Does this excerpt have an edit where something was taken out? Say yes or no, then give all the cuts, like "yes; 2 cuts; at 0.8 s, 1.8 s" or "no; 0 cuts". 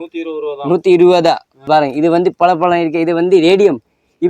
yes; 1 cut; at 1.5 s